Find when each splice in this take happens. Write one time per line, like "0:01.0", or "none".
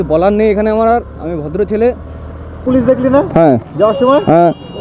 0:02.6